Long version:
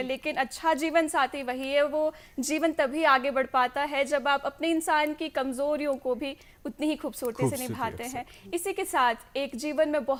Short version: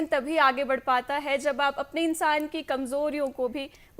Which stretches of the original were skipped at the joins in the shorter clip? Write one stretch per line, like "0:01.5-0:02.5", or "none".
none